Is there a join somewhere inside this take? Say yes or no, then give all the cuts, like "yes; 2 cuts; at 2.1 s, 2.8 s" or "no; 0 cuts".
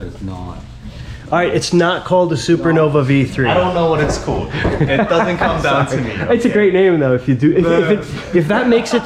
no; 0 cuts